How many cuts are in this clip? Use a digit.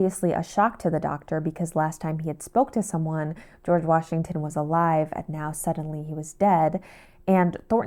0